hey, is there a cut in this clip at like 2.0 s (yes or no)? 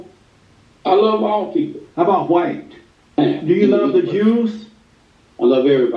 no